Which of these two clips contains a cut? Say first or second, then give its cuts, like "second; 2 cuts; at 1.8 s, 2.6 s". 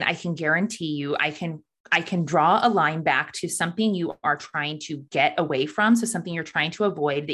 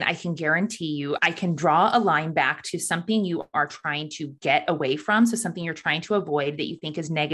second; 1 cut; at 1.2 s